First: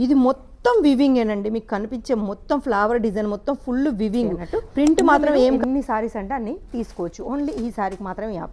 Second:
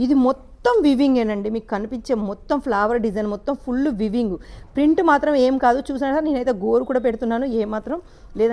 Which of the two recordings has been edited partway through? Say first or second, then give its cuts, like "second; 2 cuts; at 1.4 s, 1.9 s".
first; 1 cut; at 5.6 s